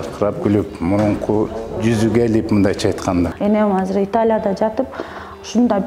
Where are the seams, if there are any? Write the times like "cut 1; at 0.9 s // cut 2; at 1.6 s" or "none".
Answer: cut 1; at 3.3 s